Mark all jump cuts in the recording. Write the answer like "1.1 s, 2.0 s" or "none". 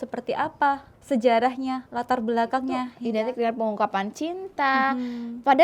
0.9 s, 2.9 s

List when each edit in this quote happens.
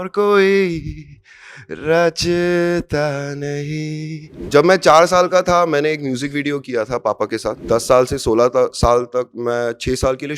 4.3 s, 7.6 s

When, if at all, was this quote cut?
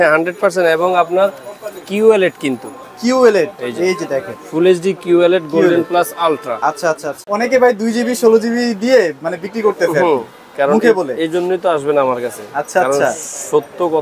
7.2 s

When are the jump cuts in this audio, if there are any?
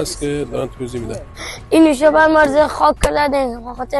1.4 s

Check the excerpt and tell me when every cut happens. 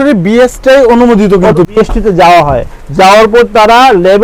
1.7 s

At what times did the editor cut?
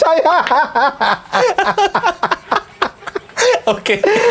none

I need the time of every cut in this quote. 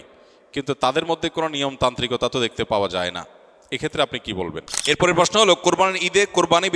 4.7 s

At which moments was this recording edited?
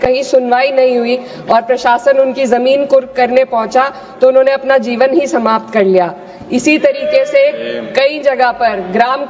none

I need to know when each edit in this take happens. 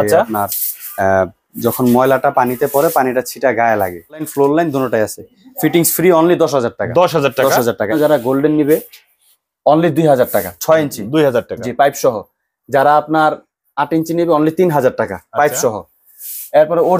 4.3 s, 7.9 s

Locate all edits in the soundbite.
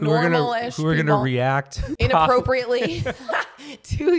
1.8 s

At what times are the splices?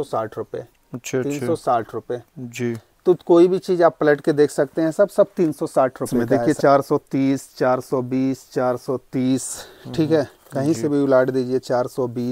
6.2 s

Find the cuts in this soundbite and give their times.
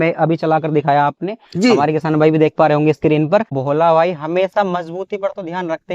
3.6 s

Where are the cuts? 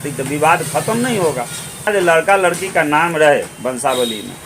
1.9 s

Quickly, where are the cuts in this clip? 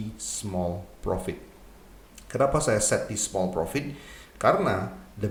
none

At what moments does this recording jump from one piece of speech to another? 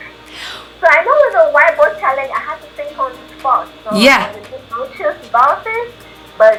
none

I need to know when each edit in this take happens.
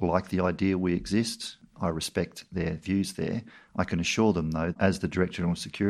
1.6 s, 3.6 s, 4.8 s

